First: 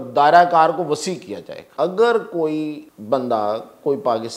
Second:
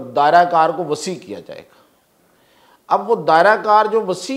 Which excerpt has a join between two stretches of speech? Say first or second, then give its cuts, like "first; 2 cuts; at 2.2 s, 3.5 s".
first; 2 cuts; at 1.6 s, 2.9 s